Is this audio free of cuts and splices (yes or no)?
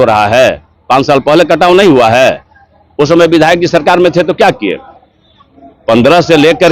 yes